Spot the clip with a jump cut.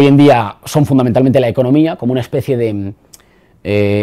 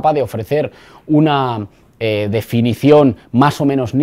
second; 1 cut; at 1.2 s

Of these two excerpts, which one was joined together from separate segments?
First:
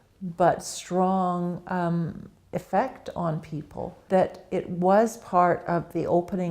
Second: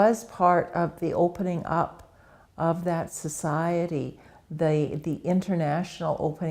first; 1 cut; at 4.0 s

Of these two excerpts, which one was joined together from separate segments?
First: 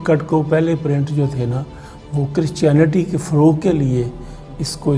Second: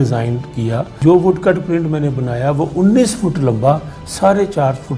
second; 1 cut; at 1.0 s

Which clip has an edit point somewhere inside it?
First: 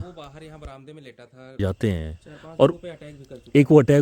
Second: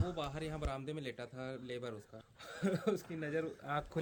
first; 1 cut; at 1.6 s

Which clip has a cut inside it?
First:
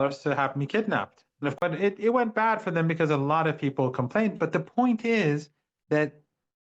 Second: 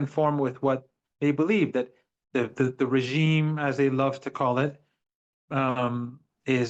first; 1 cut; at 1.6 s

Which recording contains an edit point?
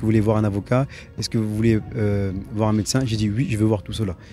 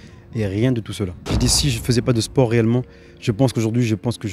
second; 1 cut; at 1.2 s

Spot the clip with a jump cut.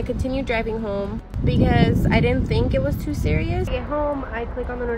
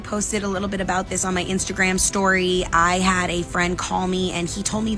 first; 1 cut; at 3.7 s

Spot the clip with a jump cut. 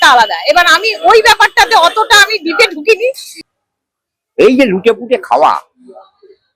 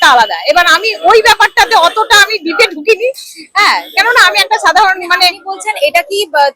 first; 1 cut; at 3.3 s

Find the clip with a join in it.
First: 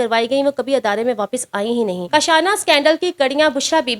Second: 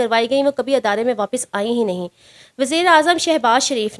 first; 1 cut; at 2.0 s

